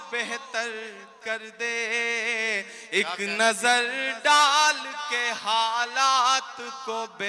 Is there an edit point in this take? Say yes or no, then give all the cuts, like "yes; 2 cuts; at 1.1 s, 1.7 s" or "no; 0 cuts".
no; 0 cuts